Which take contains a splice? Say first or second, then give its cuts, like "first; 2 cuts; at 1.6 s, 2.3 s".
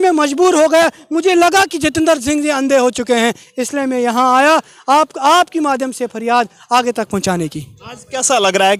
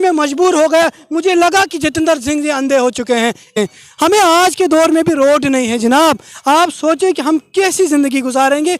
second; 1 cut; at 3.5 s